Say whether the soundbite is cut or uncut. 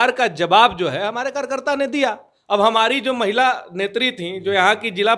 uncut